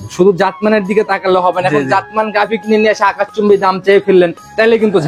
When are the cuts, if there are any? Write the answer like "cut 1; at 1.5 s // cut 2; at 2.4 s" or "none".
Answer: none

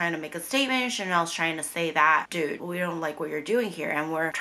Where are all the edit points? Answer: cut 1; at 2.6 s

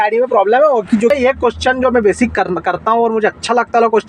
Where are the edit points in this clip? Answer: cut 1; at 1.1 s

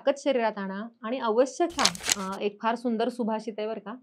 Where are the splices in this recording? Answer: cut 1; at 2.0 s

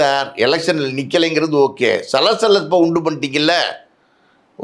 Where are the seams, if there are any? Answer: none

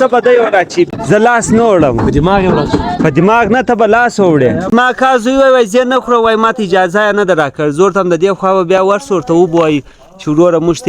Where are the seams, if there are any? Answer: cut 1; at 0.9 s // cut 2; at 4.7 s

